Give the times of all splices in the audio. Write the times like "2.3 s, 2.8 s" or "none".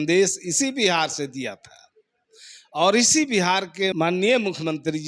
none